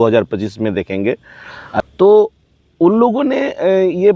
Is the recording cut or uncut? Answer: cut